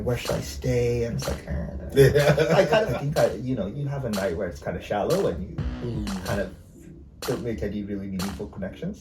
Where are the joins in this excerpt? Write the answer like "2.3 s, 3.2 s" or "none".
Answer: 2.7 s